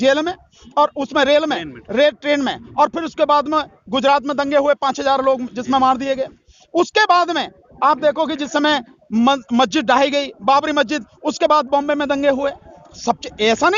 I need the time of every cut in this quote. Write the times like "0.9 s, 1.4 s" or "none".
none